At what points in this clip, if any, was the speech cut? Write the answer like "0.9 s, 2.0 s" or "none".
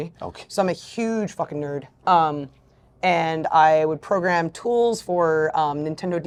none